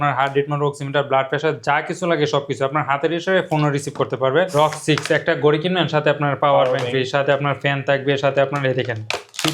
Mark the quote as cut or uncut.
cut